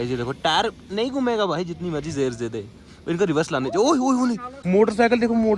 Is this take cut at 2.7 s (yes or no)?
no